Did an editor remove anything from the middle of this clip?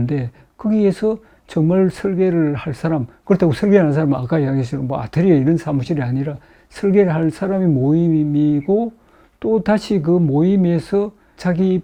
no; 0 cuts

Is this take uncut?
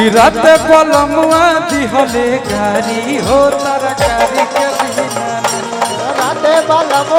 yes; 0 cuts

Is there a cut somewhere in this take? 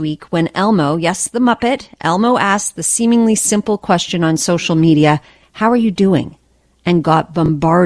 no; 0 cuts

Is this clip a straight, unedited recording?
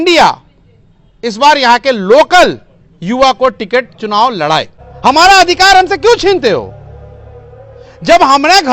no; 1 cut; at 4.8 s

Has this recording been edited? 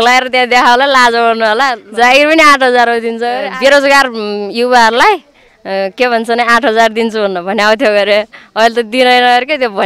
yes; 2 cuts; at 1.8 s, 3.5 s

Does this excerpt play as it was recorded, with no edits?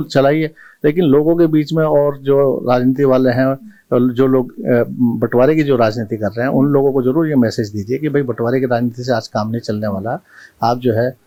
yes; 0 cuts

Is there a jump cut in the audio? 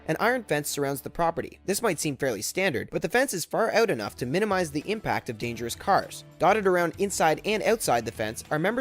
no; 0 cuts

